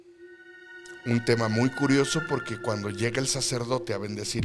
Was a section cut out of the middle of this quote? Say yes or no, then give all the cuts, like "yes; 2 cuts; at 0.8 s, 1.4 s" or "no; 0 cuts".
no; 0 cuts